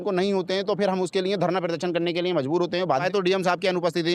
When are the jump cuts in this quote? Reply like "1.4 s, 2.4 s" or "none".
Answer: 3.0 s